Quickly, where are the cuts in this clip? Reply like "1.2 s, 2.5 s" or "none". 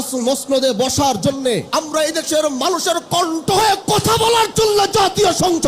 1.7 s